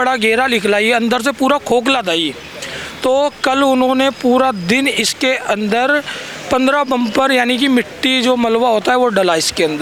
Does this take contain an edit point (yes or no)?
no